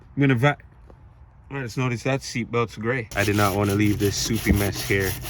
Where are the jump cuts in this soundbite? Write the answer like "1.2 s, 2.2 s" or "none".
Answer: 3.1 s